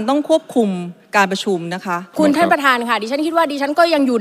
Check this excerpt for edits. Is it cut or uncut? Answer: cut